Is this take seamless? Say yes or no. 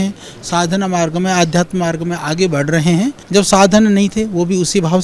no